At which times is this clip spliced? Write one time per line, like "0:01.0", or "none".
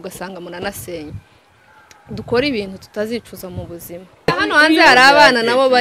0:04.1

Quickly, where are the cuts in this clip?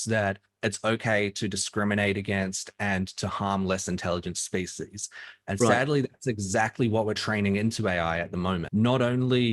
0:08.6

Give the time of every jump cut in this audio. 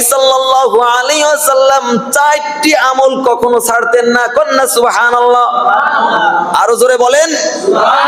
none

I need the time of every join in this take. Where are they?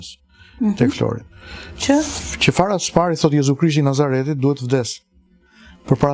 none

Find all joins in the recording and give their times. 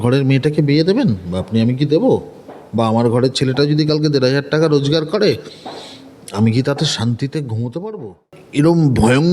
0:08.4

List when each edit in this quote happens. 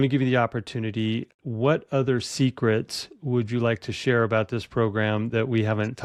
none

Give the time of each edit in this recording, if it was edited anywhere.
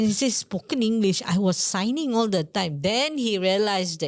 none

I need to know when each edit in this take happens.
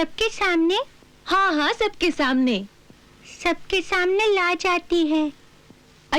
none

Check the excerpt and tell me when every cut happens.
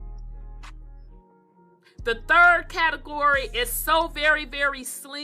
none

